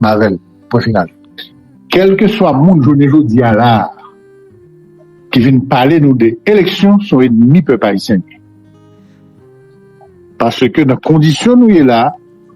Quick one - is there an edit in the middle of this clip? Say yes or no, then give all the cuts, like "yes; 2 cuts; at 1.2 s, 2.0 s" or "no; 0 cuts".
yes; 1 cut; at 1.2 s